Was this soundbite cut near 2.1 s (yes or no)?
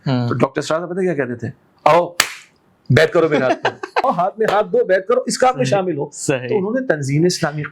no